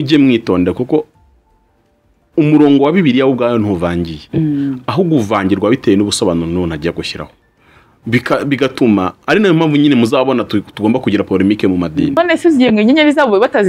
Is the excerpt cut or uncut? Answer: cut